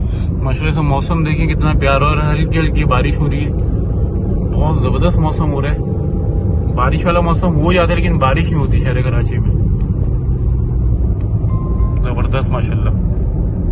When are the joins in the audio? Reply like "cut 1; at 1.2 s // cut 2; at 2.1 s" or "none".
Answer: none